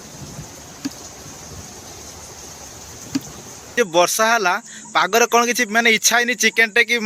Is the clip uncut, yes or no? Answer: no